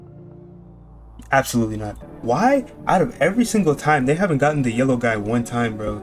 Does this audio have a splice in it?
yes; 1 cut; at 2.0 s

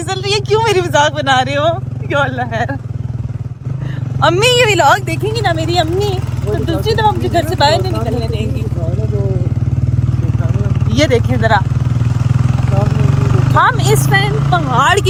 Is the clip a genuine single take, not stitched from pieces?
yes; 0 cuts

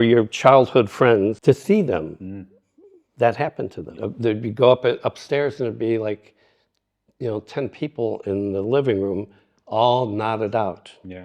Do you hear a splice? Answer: yes; 2 cuts; at 1.4 s, 4.0 s

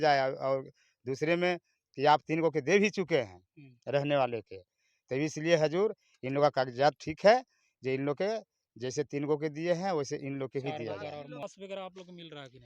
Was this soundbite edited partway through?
yes; 1 cut; at 11.4 s

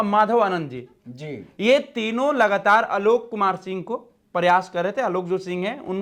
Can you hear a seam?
no; 0 cuts

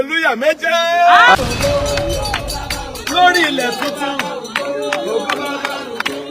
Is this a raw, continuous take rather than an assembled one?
no; 1 cut; at 1.4 s

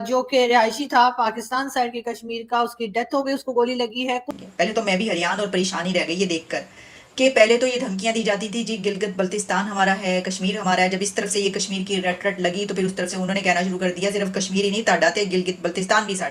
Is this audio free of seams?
no; 1 cut; at 4.3 s

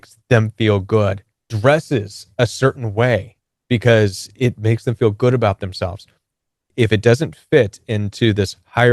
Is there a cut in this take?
yes; 2 cuts; at 1.4 s, 6.6 s

